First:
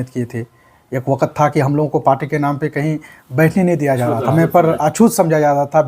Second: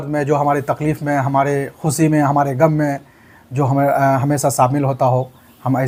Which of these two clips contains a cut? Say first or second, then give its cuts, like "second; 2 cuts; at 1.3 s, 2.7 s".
first; 1 cut; at 4.2 s